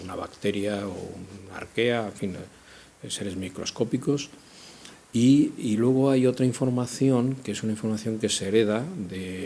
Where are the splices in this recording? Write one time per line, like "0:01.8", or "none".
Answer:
none